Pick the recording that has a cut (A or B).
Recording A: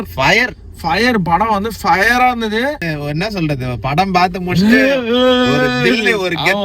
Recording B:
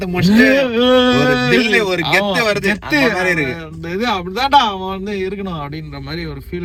A